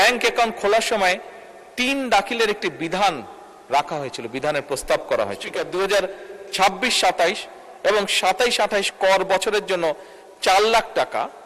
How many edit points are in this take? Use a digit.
1